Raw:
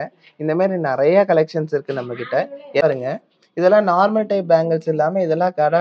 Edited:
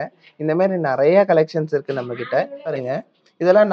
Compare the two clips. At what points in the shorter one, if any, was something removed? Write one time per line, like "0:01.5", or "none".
0:02.7